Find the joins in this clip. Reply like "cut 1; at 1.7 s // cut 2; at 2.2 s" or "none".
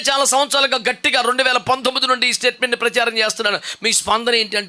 none